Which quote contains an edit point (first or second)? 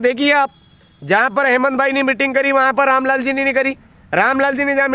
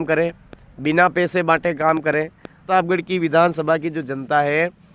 second